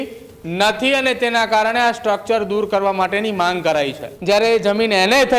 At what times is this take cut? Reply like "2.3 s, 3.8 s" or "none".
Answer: 4.1 s